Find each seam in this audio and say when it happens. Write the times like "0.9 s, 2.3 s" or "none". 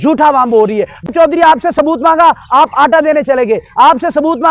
1.1 s